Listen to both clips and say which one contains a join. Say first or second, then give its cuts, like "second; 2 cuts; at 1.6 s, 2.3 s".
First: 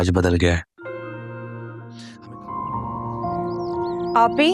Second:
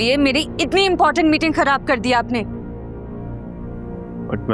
first; 1 cut; at 2.1 s